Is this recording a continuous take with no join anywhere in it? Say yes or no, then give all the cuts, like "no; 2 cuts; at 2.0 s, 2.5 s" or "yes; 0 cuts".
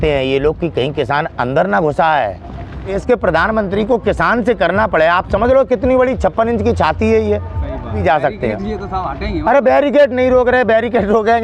no; 2 cuts; at 3.0 s, 8.0 s